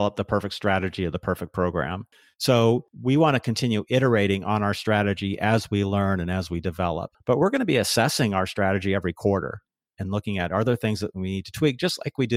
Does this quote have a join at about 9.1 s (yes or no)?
no